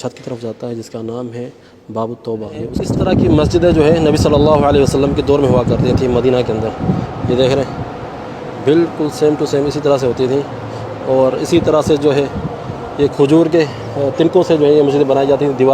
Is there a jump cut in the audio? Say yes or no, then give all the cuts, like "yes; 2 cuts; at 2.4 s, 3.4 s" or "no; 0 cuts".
yes; 1 cut; at 2.8 s